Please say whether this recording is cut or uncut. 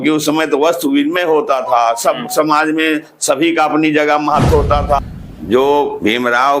cut